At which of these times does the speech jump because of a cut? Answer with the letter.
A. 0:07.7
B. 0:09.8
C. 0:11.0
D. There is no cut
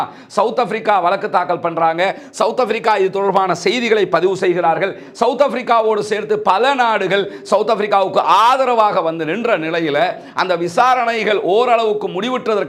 D